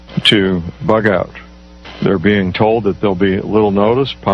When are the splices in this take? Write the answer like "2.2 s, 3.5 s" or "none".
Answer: 2.5 s